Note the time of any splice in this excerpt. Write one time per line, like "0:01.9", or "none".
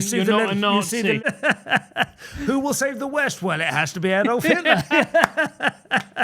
0:01.2